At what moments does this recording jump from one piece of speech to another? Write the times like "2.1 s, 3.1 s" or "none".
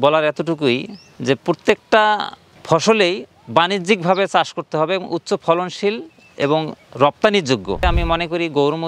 7.8 s